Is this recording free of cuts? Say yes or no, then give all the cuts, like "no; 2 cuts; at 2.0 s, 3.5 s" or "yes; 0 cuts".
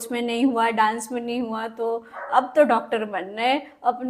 yes; 0 cuts